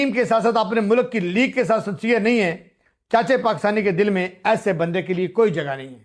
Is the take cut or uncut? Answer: uncut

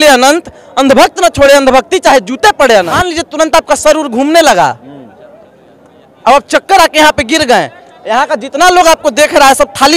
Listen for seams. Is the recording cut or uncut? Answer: cut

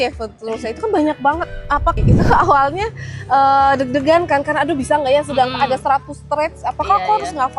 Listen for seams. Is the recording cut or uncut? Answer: cut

